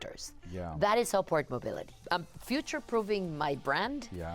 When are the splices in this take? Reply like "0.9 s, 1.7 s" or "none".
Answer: 2.0 s